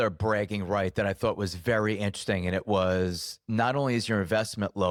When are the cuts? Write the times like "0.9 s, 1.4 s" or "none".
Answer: none